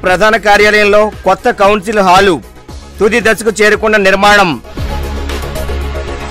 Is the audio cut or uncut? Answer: uncut